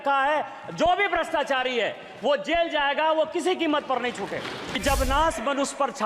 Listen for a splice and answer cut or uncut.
cut